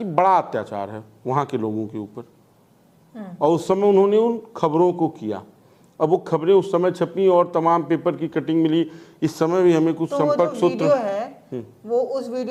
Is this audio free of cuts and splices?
yes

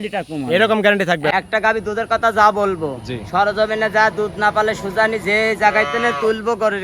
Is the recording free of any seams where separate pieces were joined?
no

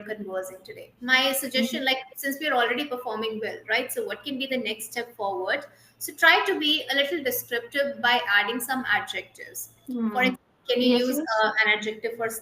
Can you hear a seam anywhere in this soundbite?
yes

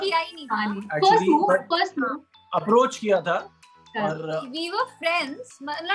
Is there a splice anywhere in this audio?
no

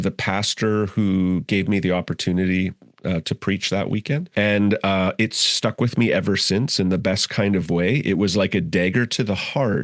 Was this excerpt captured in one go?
no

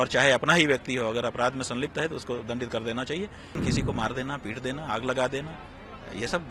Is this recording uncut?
no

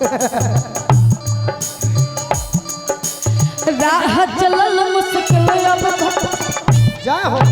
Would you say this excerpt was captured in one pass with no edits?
no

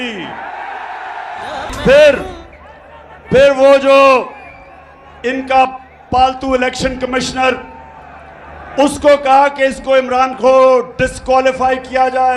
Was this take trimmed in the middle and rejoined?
no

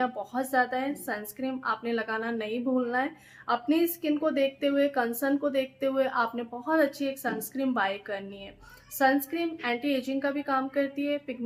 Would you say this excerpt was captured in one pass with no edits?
yes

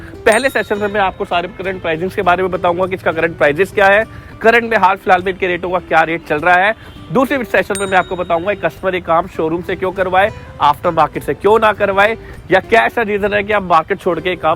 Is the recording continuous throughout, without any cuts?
yes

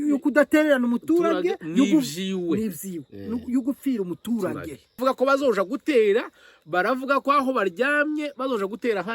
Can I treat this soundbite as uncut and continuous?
no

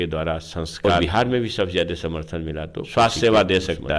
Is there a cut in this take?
yes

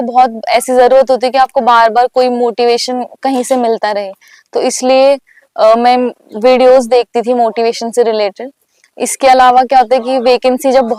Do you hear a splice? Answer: no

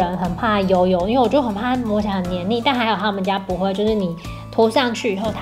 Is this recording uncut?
yes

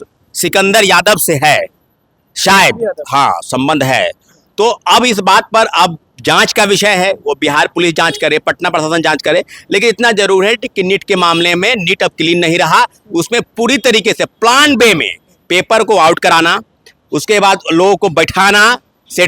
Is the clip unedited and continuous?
yes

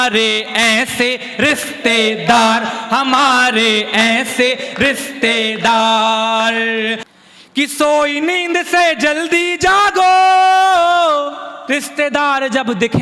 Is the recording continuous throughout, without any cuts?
no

